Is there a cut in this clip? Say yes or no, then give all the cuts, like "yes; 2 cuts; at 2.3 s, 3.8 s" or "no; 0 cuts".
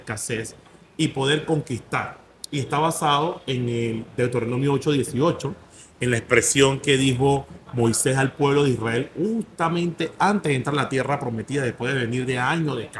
no; 0 cuts